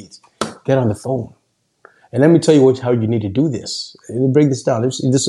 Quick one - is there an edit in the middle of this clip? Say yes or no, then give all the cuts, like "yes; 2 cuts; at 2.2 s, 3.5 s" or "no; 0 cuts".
no; 0 cuts